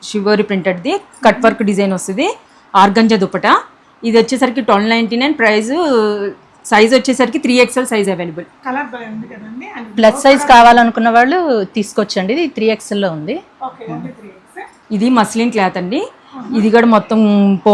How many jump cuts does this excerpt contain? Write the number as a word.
zero